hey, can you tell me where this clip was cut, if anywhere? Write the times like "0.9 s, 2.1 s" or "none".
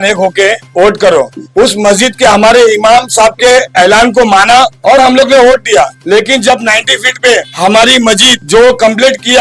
1.4 s, 4.8 s, 6.0 s, 7.5 s, 8.3 s